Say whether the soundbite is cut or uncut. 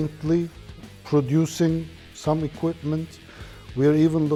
uncut